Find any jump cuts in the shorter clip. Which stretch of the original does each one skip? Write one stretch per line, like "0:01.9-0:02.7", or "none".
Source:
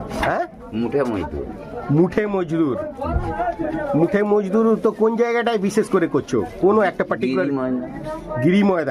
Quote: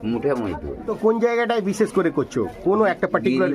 0:01.6-0:04.9